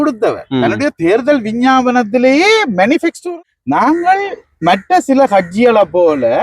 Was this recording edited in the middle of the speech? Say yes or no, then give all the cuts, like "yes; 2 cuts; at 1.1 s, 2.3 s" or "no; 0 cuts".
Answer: yes; 1 cut; at 3.2 s